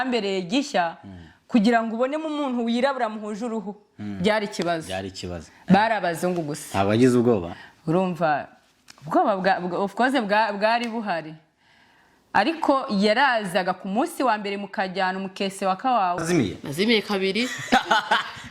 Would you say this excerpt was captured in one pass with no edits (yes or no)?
no